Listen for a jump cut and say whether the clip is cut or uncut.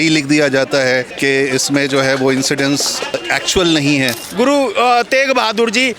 cut